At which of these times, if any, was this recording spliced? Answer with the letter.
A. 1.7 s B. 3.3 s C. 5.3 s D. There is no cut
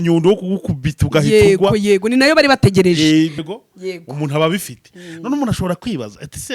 B